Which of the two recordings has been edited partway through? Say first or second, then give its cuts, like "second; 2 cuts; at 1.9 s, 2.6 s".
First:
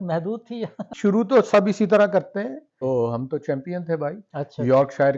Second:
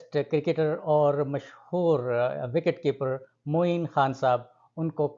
first; 2 cuts; at 0.9 s, 2.8 s